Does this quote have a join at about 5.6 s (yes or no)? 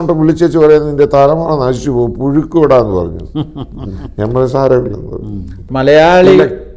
yes